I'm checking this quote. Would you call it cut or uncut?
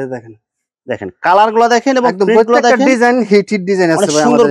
uncut